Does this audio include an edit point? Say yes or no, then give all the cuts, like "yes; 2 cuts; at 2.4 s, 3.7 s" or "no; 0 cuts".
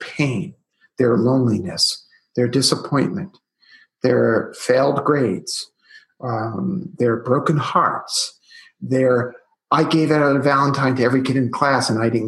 no; 0 cuts